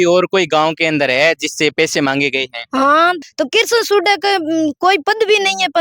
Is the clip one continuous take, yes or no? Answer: no